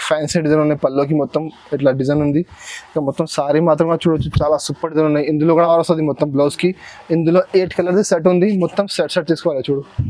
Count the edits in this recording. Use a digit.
1